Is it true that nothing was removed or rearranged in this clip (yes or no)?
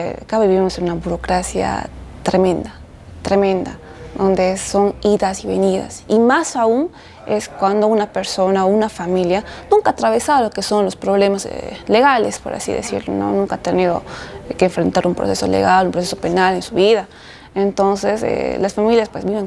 yes